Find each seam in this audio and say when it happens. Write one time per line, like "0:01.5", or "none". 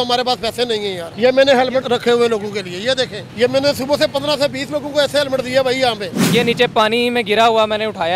0:01.0
0:01.8
0:03.2
0:06.1